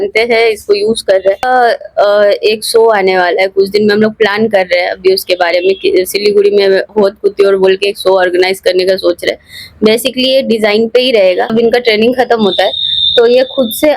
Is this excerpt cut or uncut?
cut